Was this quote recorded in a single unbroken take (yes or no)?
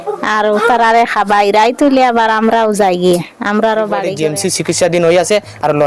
no